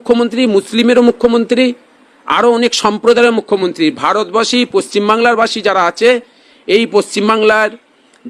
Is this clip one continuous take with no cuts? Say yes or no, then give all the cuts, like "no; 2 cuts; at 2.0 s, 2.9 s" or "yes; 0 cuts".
yes; 0 cuts